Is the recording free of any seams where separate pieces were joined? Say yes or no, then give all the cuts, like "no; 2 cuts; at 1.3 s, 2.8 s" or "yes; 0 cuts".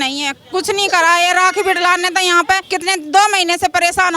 no; 1 cut; at 2.6 s